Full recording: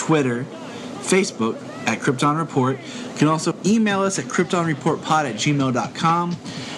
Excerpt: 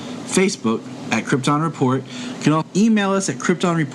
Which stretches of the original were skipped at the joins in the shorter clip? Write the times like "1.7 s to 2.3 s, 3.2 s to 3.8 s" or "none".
3.4 s to 3.6 s